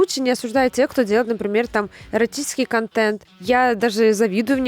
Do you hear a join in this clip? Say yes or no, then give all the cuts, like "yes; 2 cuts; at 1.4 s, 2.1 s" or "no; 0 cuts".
yes; 1 cut; at 3.3 s